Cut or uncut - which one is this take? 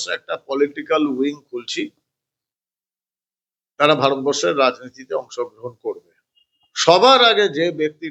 uncut